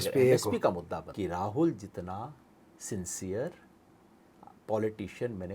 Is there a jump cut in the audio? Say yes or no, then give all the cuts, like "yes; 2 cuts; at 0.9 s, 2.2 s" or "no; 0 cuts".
yes; 1 cut; at 1.1 s